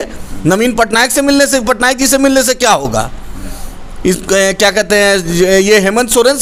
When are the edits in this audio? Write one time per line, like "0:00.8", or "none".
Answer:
none